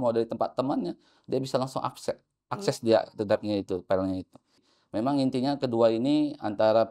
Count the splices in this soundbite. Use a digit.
1